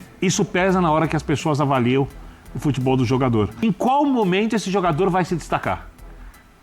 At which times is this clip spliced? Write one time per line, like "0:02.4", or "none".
0:03.6